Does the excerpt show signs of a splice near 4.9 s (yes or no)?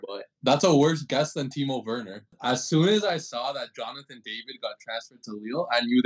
no